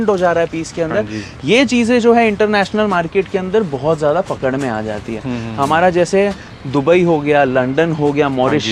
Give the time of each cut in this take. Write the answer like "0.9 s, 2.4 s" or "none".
none